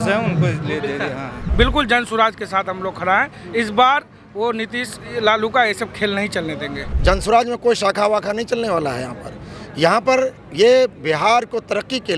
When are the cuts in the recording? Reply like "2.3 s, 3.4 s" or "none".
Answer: 1.3 s, 6.9 s